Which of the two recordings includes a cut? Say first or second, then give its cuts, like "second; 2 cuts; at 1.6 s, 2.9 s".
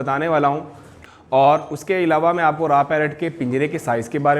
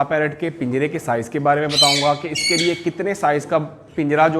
first; 1 cut; at 0.9 s